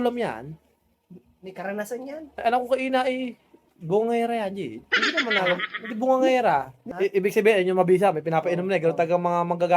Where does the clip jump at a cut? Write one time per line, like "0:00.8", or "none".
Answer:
0:06.8